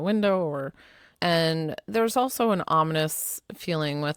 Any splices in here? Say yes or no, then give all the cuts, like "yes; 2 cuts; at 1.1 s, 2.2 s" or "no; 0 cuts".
no; 0 cuts